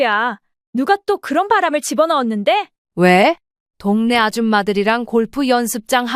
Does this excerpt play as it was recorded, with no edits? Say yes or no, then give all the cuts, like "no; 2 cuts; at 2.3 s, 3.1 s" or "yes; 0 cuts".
no; 1 cut; at 2.8 s